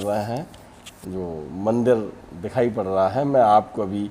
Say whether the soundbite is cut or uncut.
uncut